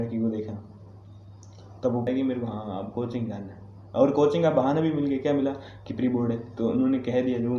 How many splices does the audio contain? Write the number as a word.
one